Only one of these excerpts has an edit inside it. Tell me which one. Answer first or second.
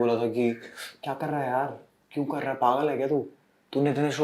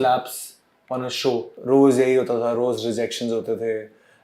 second